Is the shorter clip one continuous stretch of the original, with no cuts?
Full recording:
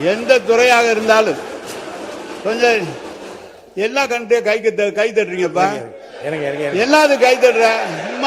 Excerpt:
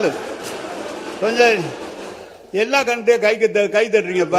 yes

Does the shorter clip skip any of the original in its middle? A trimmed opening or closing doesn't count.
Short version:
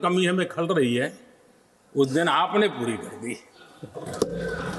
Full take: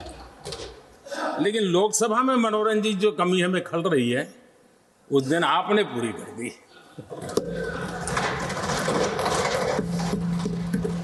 no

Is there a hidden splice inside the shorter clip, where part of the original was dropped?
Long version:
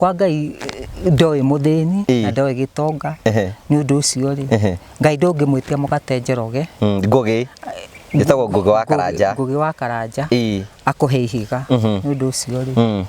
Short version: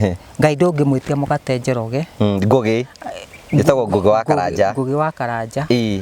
no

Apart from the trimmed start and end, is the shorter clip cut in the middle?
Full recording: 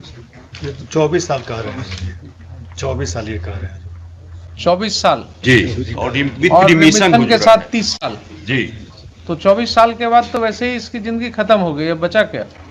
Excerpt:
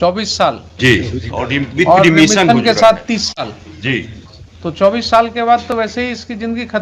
no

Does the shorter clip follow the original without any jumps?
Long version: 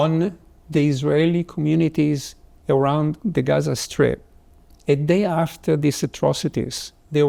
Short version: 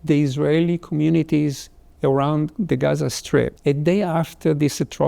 no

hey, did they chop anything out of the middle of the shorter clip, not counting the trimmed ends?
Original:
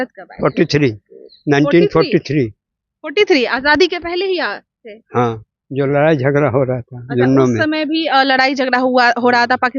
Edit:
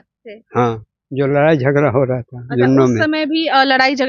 no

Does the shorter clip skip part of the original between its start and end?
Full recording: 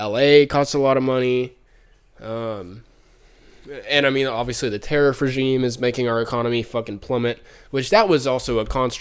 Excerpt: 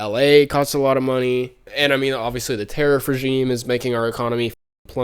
yes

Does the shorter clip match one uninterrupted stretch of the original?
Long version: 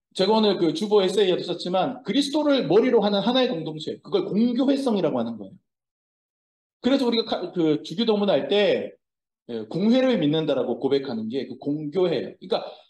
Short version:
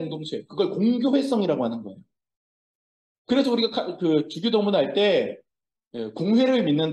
yes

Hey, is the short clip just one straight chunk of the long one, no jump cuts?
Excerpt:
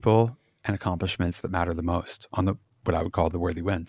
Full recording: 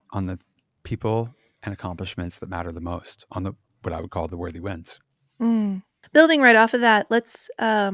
yes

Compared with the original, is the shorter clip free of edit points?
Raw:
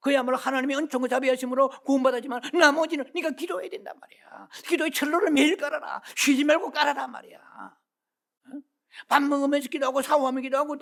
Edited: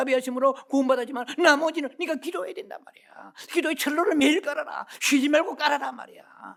yes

